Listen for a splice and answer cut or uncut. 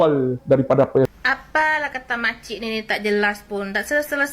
cut